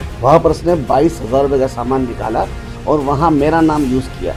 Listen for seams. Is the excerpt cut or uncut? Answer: uncut